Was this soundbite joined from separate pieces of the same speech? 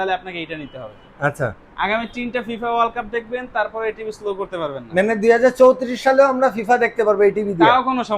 no; 0 cuts

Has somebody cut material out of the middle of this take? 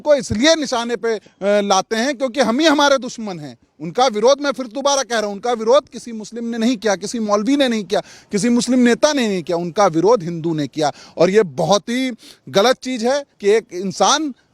yes; 2 cuts; at 1.3 s, 13.3 s

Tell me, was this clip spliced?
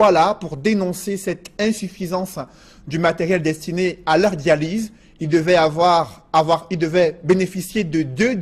yes; 1 cut; at 5.7 s

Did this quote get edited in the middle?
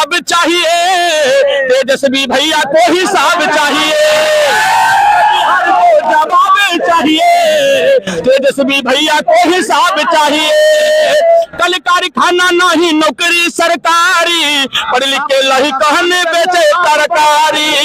no; 0 cuts

